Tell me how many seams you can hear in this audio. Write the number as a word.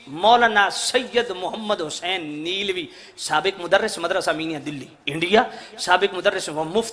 zero